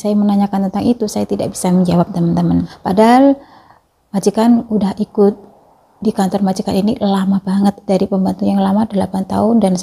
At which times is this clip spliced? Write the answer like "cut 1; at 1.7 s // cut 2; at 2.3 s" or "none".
cut 1; at 2.7 s